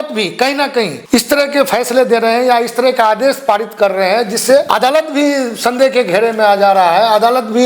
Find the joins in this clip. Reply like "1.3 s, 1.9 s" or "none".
1.0 s, 4.7 s